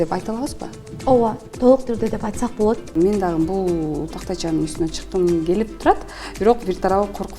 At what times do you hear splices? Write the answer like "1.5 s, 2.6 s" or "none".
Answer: 2.9 s